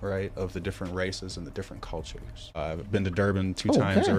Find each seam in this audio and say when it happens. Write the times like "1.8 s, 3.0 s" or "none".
2.6 s